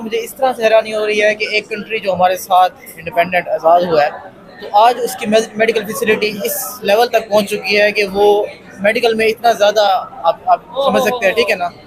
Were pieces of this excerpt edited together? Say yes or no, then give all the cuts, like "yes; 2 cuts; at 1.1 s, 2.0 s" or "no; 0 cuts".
no; 0 cuts